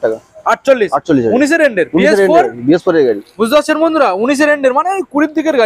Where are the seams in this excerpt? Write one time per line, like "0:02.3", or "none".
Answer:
none